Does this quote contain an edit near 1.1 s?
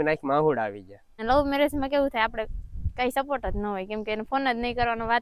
yes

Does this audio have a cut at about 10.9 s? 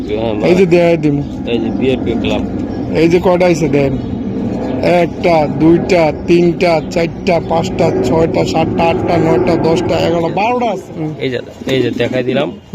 yes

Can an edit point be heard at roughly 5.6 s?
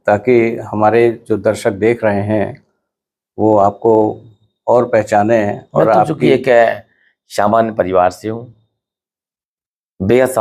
no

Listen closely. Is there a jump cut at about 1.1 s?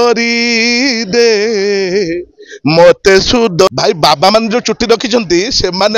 no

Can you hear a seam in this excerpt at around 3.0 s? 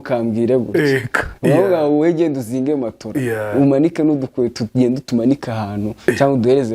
no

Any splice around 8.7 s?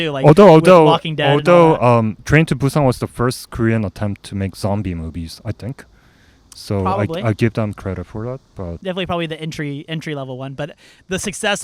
yes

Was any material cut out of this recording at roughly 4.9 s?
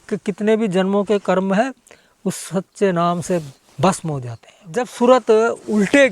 yes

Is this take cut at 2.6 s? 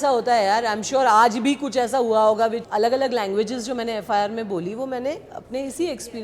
yes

